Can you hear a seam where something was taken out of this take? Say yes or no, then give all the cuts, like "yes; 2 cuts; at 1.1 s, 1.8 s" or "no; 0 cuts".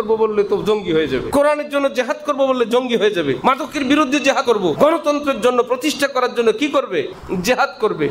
yes; 4 cuts; at 1.3 s, 3.4 s, 4.5 s, 7.2 s